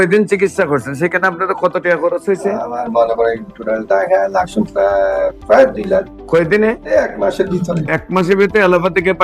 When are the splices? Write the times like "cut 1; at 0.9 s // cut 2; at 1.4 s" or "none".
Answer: none